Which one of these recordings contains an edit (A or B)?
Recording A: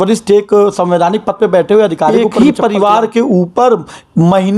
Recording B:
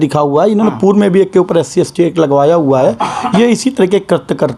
A